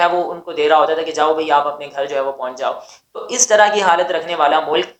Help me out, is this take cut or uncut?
uncut